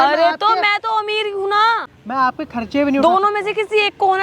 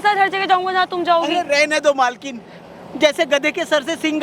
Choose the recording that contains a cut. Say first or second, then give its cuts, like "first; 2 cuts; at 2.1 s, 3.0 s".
first; 1 cut; at 1.9 s